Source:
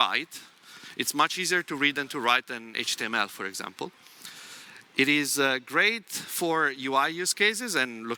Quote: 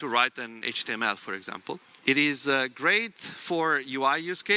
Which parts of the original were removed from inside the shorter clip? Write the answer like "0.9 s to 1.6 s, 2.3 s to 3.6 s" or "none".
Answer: 4.0 s to 4.8 s